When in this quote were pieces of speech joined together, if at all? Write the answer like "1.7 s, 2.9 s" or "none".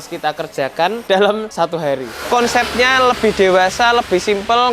1.0 s, 1.9 s